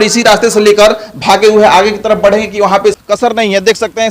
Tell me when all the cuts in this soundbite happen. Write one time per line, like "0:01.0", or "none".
0:03.0